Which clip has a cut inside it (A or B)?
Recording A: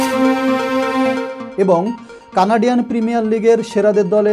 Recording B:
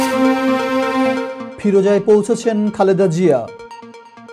A